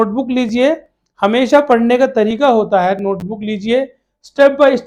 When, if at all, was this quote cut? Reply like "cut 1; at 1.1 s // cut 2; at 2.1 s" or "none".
none